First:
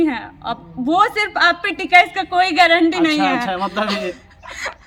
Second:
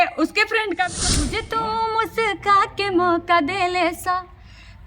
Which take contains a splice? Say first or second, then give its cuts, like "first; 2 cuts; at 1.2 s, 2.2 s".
second; 1 cut; at 1.1 s